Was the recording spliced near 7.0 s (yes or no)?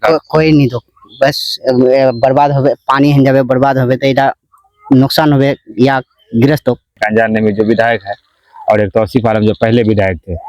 yes